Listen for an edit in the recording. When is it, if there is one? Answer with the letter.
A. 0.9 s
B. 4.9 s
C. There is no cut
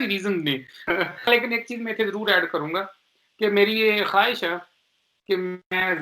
A